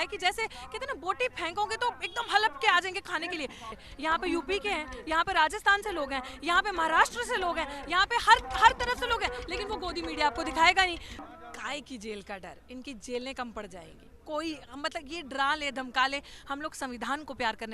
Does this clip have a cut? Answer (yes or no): yes